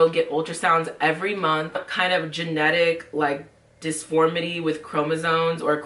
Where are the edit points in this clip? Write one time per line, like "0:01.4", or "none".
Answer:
0:01.8

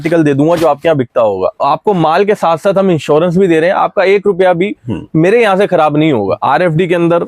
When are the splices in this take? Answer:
0:01.6
0:06.4

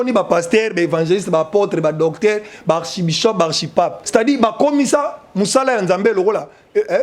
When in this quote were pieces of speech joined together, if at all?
0:04.0

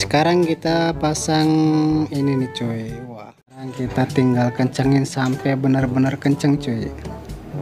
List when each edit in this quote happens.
0:03.7

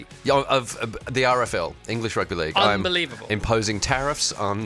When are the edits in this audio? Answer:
none

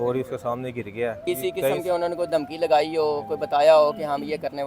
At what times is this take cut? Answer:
0:01.2

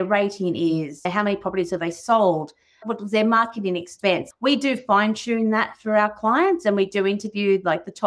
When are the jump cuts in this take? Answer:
0:02.8
0:04.3

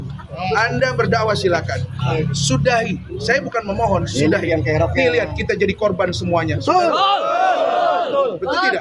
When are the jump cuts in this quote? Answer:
none

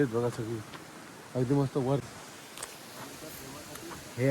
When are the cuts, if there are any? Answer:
0:02.0

